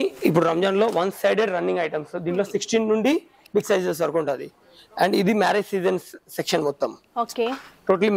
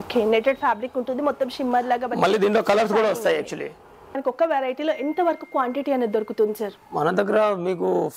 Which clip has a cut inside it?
second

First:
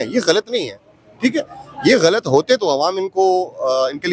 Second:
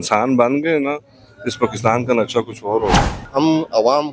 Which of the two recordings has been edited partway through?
second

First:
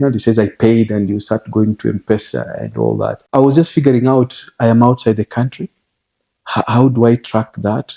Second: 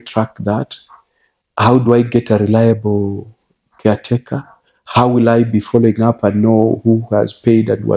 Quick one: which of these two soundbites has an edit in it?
first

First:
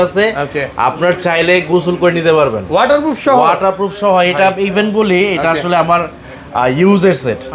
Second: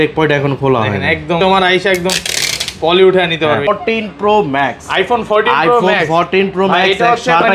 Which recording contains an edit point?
second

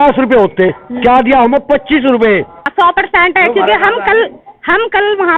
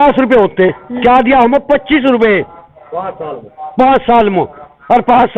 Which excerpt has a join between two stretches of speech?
first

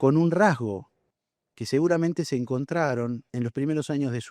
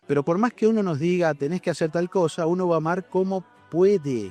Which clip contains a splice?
first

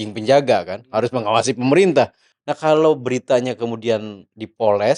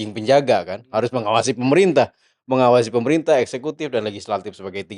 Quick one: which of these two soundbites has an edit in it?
first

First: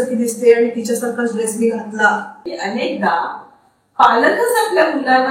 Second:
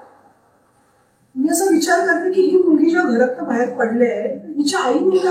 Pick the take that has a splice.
first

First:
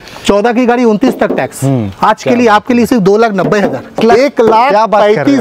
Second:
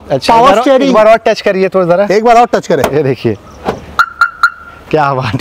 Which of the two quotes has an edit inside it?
first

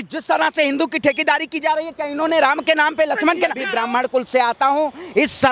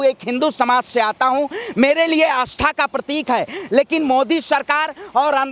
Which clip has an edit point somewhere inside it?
first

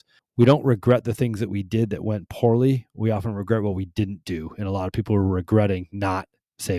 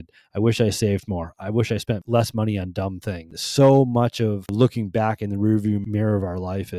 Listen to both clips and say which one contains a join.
second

